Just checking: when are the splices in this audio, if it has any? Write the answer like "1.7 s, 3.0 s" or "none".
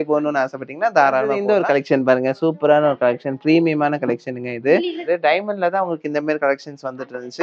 1.3 s, 5.0 s

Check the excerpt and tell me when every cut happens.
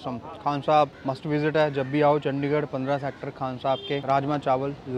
1.0 s, 4.0 s

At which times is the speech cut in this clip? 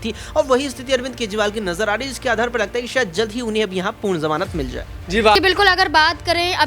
5.3 s

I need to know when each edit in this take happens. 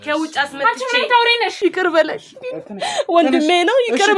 1.5 s

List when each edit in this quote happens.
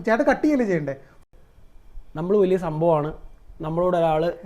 1.1 s

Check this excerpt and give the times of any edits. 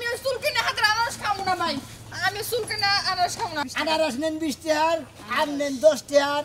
3.7 s

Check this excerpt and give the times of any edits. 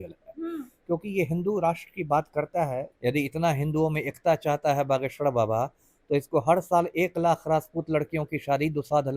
2.9 s

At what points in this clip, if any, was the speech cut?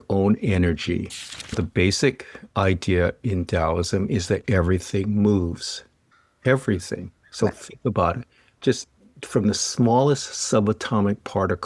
1.6 s

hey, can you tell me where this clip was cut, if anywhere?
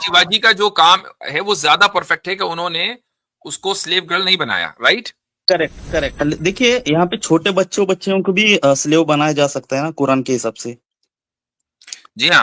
6.1 s

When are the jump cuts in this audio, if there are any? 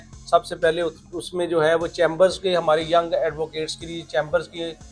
none

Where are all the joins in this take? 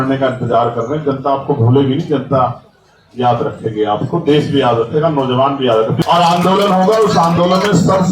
6.0 s

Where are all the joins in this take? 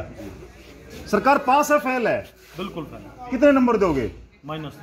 none

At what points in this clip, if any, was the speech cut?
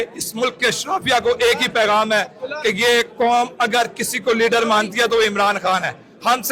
none

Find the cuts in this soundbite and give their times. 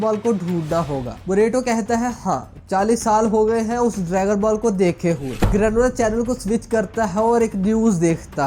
5.3 s

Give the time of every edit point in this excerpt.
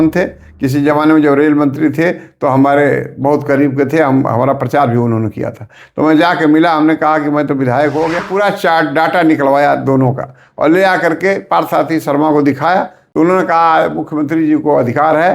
8.2 s, 13.0 s

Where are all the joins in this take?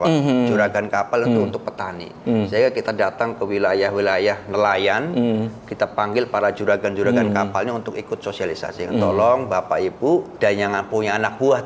10.3 s

